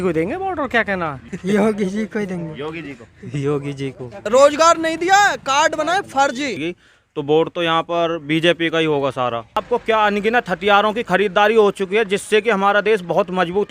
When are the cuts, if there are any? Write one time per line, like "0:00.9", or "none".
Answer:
0:01.2
0:04.2
0:06.6
0:09.6

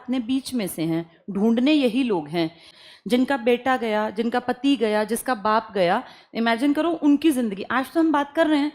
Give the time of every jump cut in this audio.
0:02.7

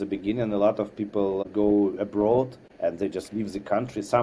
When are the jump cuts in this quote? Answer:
0:01.5
0:02.6

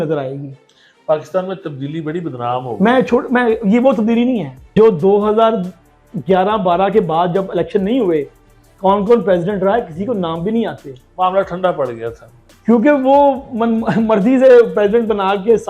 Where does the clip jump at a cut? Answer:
0:04.7

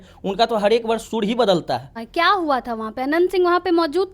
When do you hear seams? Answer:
0:02.0

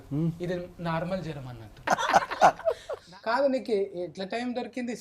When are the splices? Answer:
0:01.8
0:03.1

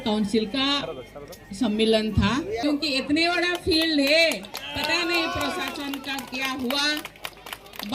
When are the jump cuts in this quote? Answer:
0:02.6

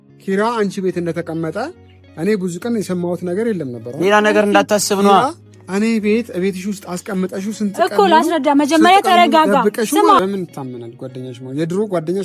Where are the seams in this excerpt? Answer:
0:10.2

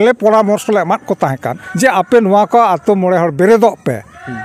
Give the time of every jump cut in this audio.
0:01.6

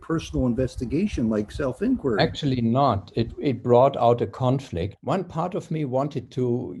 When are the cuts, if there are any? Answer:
0:04.9

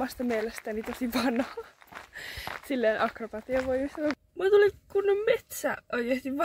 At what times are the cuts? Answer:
0:04.2

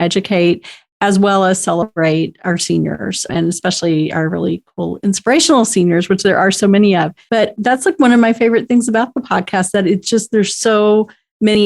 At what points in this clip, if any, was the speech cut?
0:03.3
0:07.5

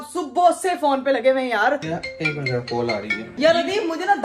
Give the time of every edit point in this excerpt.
0:01.9
0:03.3

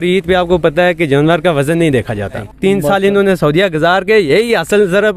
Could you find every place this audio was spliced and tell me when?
0:02.5

